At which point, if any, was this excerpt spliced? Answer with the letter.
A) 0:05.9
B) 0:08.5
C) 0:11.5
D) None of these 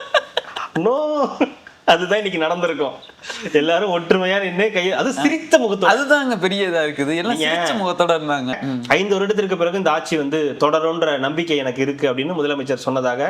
B